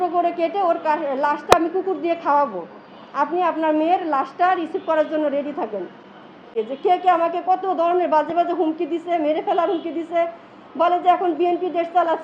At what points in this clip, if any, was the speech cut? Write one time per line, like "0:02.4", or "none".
0:06.5